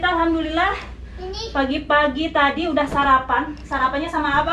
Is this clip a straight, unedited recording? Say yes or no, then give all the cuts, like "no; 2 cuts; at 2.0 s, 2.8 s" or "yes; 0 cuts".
yes; 0 cuts